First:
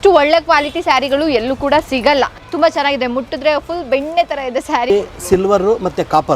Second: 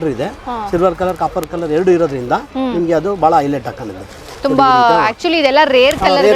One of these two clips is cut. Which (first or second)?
first